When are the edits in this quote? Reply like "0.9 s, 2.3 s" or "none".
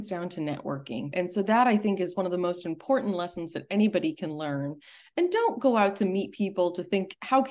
1.0 s